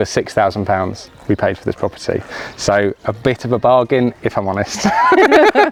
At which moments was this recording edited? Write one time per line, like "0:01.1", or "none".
none